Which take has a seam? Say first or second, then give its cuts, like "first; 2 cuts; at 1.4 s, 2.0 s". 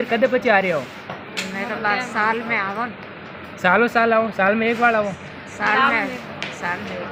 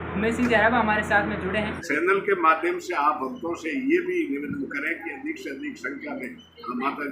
second; 1 cut; at 1.9 s